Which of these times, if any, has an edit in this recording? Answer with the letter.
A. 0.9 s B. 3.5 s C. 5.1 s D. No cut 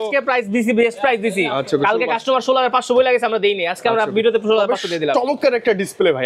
D